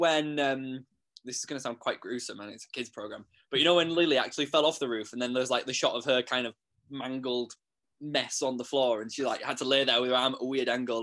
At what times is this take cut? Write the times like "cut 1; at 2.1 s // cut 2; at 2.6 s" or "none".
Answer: none